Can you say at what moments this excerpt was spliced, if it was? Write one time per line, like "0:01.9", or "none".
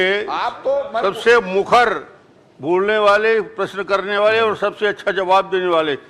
none